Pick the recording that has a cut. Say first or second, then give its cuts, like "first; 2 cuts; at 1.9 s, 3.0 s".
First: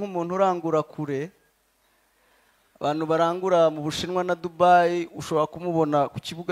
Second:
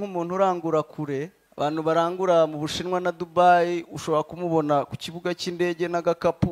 second; 1 cut; at 1.4 s